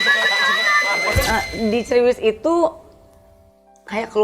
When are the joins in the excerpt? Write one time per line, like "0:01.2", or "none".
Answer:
0:01.2